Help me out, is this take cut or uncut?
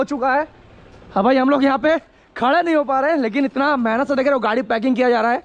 uncut